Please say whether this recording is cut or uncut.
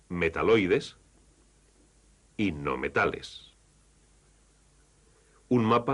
cut